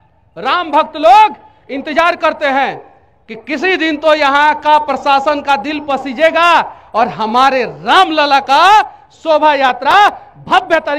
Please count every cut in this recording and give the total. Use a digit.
0